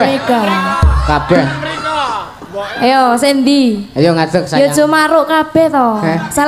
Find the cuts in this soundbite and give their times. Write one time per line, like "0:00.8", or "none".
none